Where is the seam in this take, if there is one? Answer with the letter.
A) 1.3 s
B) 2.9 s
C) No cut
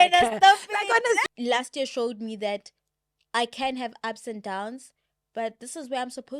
A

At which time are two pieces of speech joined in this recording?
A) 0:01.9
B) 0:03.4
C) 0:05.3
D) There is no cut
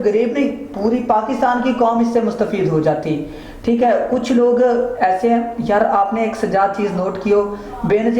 D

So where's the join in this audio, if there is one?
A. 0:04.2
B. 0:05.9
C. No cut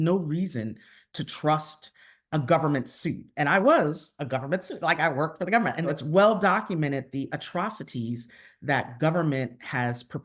B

